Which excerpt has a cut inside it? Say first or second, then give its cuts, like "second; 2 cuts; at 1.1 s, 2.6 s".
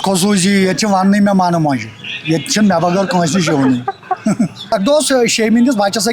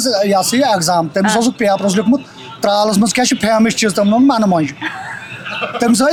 first; 1 cut; at 4.7 s